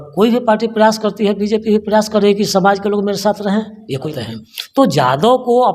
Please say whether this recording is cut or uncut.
cut